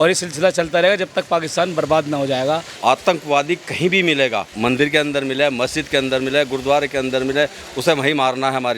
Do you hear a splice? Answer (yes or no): yes